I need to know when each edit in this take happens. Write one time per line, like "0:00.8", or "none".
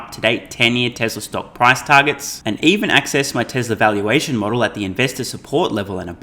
none